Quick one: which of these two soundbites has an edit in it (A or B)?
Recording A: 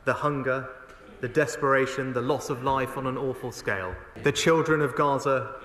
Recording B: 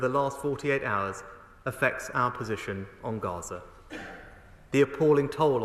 A